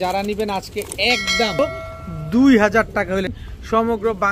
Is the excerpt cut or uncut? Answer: cut